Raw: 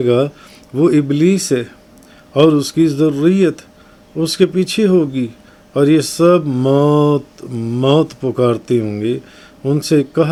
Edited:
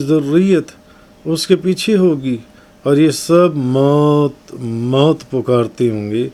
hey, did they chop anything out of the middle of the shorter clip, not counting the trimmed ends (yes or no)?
no